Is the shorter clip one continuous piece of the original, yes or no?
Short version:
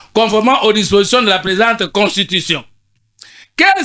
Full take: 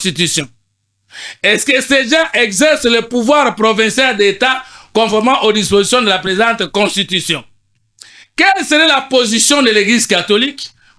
yes